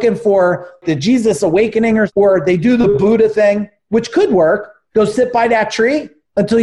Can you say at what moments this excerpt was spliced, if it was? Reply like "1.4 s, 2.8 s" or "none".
0.8 s, 2.1 s